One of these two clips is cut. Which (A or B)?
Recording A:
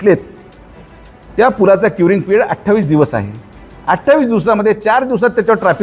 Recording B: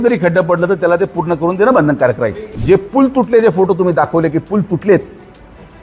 B